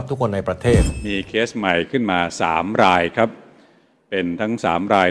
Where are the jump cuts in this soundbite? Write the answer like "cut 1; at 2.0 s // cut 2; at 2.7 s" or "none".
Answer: cut 1; at 1.0 s